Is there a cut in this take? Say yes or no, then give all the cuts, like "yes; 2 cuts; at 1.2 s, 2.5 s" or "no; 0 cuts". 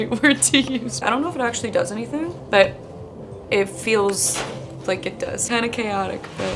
yes; 3 cuts; at 1.0 s, 2.4 s, 5.5 s